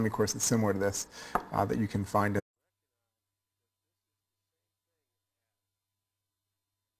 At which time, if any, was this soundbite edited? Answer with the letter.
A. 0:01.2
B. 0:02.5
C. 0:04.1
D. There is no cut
D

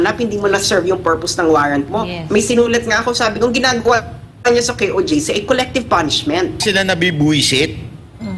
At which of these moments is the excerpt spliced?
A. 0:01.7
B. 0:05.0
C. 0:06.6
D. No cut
C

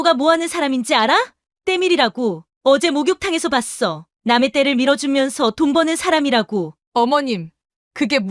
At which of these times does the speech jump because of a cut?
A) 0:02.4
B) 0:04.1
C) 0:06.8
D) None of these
C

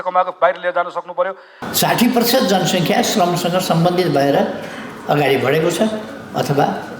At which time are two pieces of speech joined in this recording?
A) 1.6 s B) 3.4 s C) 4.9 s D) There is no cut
A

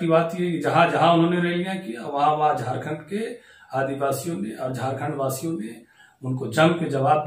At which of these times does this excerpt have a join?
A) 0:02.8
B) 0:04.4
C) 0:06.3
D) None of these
D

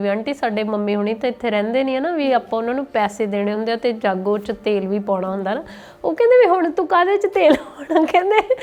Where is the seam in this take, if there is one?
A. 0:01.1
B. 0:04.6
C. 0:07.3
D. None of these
D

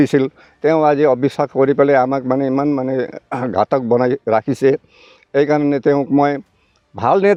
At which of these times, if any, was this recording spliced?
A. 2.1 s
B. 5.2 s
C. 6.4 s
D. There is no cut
D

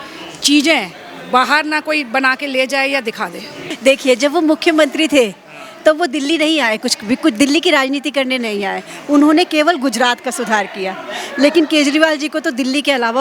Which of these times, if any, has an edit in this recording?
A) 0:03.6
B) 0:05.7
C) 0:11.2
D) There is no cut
A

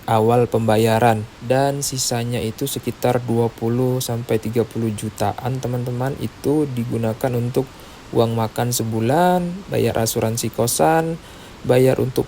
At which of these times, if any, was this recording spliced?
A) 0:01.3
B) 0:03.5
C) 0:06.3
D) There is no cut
A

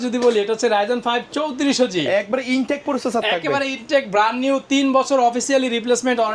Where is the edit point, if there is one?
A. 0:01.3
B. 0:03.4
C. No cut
C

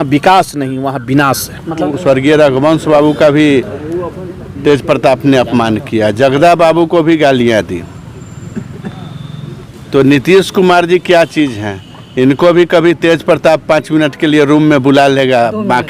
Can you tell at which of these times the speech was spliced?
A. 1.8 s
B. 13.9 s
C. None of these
A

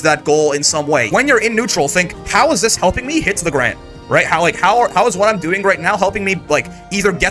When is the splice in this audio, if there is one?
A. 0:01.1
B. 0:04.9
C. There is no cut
A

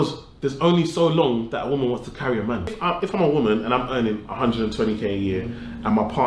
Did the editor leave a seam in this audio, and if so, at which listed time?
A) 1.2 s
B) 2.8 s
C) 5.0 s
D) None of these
B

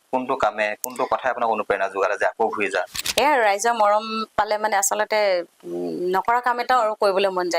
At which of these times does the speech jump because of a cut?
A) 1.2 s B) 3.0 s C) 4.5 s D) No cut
B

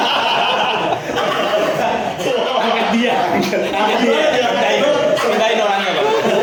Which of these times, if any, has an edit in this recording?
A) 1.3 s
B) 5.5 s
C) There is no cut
C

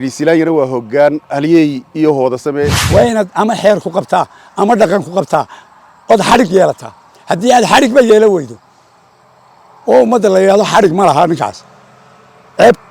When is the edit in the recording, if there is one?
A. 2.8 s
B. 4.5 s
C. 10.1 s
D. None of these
A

